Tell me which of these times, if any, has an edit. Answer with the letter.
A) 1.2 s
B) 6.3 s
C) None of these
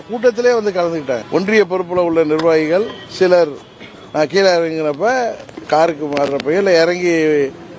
A